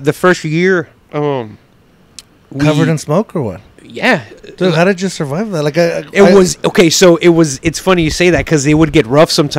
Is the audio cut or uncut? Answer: uncut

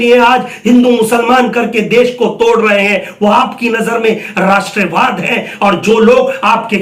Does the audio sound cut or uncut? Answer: uncut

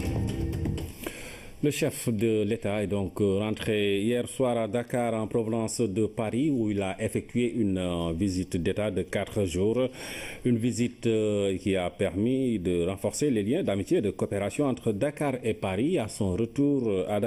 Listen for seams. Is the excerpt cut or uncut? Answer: uncut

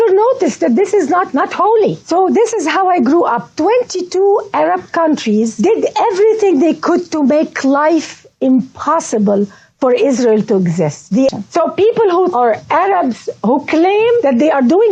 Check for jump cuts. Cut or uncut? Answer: cut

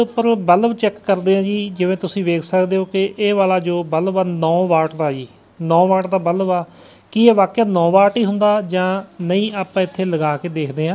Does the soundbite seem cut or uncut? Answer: uncut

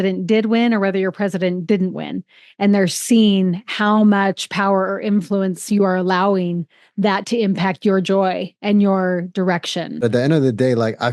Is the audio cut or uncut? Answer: cut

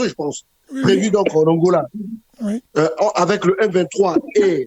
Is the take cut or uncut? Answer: uncut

